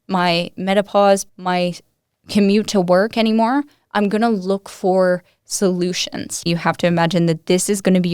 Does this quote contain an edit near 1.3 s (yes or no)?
yes